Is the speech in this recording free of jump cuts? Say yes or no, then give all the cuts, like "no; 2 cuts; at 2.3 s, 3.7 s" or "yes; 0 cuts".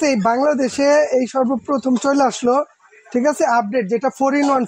yes; 0 cuts